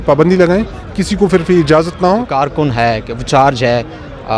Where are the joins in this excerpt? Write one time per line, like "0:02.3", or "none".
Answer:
0:02.3